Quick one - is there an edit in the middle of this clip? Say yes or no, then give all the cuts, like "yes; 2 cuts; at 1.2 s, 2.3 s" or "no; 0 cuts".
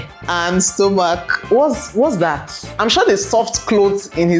yes; 1 cut; at 1.3 s